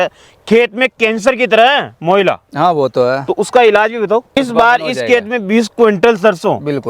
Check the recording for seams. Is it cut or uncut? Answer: cut